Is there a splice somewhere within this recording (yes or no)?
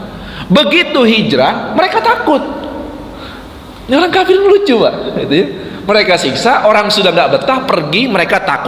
no